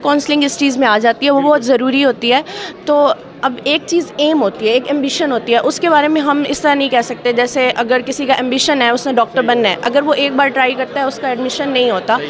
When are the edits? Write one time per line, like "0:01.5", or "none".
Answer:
none